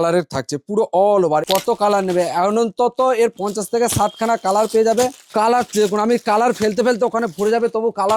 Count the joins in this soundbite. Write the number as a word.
three